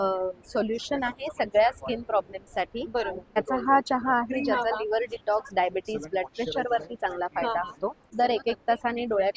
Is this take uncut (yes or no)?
no